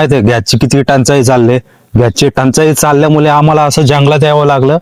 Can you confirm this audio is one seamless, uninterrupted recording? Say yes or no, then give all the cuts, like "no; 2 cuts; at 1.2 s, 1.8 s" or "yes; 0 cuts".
yes; 0 cuts